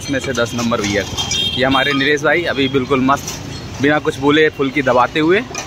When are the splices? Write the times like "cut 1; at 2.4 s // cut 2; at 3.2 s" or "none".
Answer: none